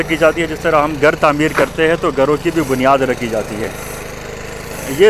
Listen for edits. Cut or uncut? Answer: uncut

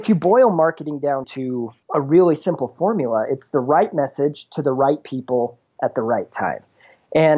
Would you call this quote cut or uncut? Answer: cut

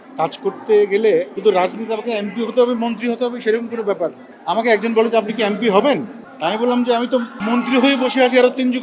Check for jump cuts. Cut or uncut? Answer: cut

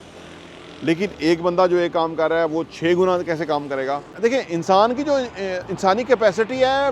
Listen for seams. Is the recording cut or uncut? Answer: cut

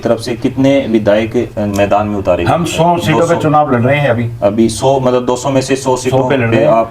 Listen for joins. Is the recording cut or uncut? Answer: uncut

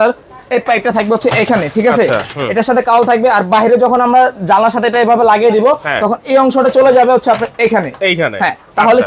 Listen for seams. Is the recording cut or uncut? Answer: uncut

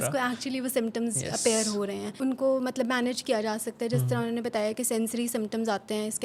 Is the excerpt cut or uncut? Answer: cut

